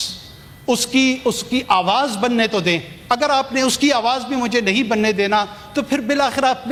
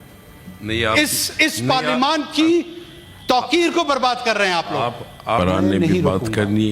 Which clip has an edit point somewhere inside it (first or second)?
second